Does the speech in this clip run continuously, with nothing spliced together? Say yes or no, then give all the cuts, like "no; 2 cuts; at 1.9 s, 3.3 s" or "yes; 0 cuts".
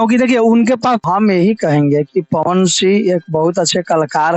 no; 1 cut; at 1.0 s